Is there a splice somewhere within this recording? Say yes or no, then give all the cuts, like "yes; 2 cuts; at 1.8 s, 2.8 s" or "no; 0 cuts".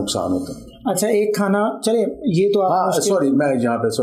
no; 0 cuts